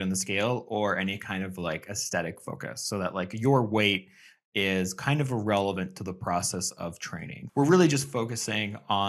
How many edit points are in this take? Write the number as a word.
one